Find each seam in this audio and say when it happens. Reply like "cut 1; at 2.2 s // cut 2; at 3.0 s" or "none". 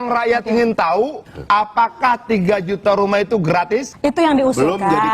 cut 1; at 1.2 s